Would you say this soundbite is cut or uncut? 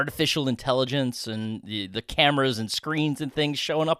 uncut